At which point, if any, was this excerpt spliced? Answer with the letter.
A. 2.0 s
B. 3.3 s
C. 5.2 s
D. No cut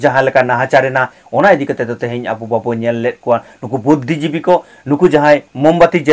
D